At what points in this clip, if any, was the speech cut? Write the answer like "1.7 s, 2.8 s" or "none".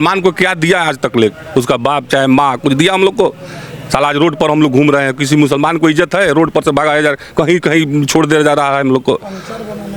none